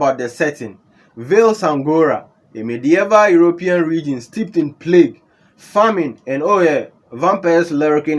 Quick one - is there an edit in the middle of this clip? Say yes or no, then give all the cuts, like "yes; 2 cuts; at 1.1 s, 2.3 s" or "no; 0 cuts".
no; 0 cuts